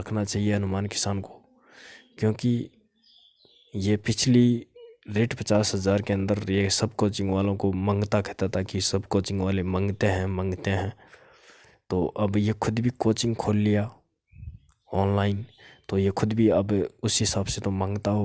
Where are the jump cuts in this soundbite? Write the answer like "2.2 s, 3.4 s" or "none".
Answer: none